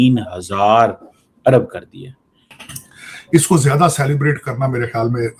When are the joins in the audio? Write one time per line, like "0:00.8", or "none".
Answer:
0:02.8